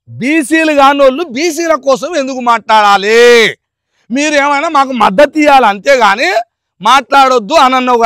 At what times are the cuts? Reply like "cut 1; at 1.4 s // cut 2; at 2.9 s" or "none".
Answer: none